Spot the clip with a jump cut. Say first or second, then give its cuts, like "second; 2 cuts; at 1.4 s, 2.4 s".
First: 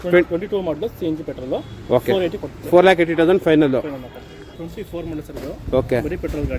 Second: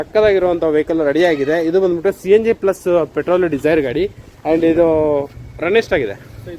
first; 1 cut; at 4.5 s